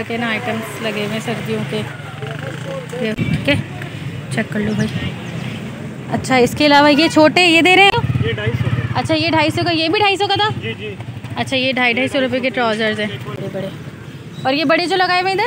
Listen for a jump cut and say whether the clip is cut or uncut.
cut